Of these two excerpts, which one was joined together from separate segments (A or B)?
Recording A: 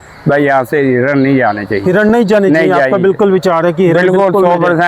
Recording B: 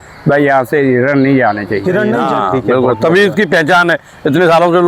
B